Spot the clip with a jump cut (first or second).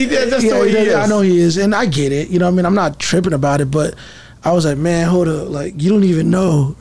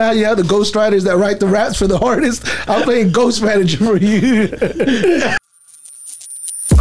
second